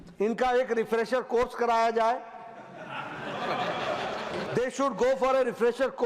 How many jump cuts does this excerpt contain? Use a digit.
1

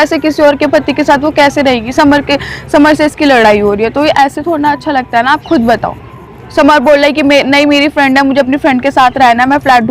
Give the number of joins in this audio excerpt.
0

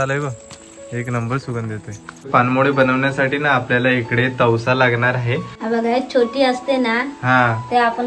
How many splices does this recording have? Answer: 2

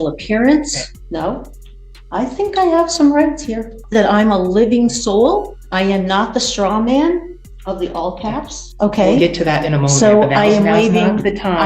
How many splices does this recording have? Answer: 4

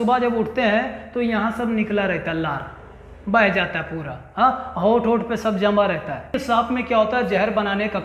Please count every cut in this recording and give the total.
1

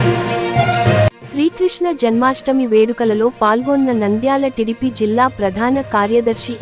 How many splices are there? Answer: 1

